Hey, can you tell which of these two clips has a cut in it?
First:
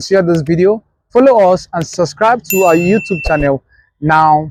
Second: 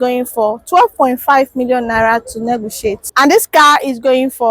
second; 1 cut; at 3.1 s

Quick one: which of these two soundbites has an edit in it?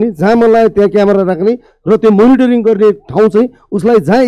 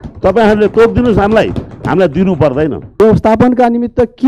second; 1 cut; at 2.9 s

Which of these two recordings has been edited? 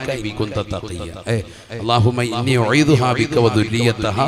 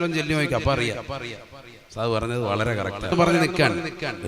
second; 1 cut; at 3.1 s

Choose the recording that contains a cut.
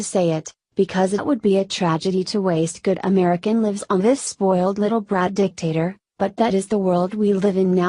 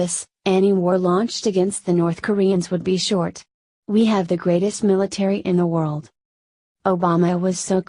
first; 1 cut; at 4.6 s

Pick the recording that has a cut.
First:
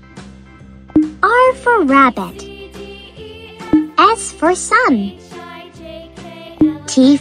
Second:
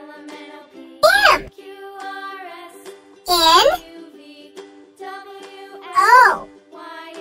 second; 5 cuts; at 0.7 s, 1.5 s, 3.0 s, 3.8 s, 5.6 s

